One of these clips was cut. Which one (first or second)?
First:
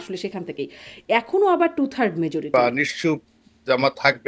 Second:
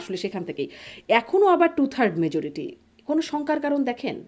first